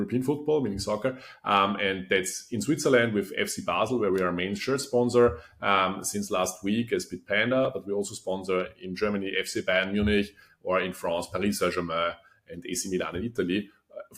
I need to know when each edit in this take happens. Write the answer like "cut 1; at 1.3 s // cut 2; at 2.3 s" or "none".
none